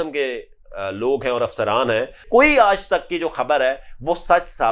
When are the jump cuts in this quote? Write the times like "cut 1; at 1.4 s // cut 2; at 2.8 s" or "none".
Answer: cut 1; at 2.2 s